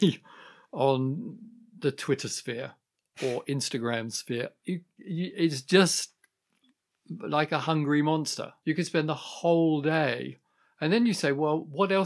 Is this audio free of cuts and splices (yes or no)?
no